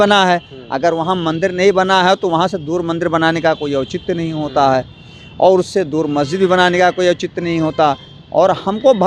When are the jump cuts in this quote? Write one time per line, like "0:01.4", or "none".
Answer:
none